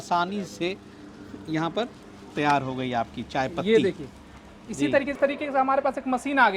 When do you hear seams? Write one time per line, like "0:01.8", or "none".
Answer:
0:05.1